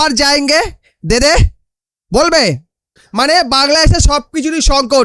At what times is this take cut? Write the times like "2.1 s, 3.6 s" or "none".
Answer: 2.9 s